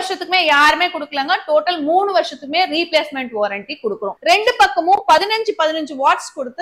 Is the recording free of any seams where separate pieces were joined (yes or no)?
no